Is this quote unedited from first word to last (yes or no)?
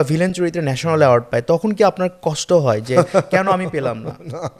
yes